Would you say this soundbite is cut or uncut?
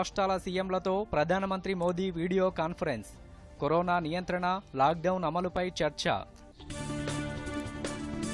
uncut